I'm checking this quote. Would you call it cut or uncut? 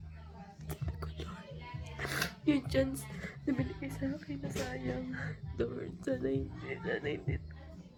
uncut